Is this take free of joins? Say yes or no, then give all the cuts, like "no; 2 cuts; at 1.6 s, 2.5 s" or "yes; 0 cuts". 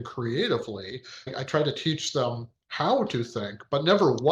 no; 1 cut; at 1.3 s